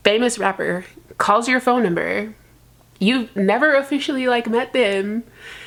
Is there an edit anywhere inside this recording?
no; 0 cuts

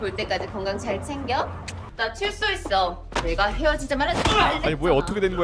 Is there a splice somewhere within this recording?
yes; 1 cut; at 3.0 s

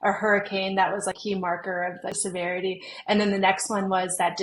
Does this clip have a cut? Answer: yes; 2 cuts; at 1.2 s, 2.2 s

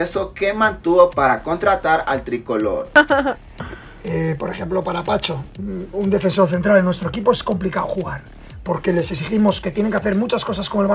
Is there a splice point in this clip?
yes; 1 cut; at 3.0 s

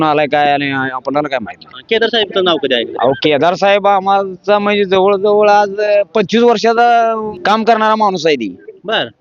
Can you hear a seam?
yes; 1 cut; at 7.3 s

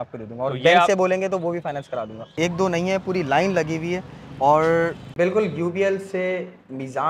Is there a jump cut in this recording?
yes; 2 cuts; at 2.3 s, 5.0 s

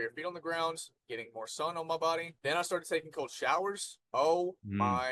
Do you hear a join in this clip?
yes; 2 cuts; at 2.3 s, 3.9 s

